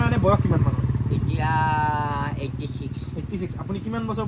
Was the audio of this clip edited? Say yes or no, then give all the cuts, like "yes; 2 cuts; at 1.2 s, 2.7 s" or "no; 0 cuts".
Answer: no; 0 cuts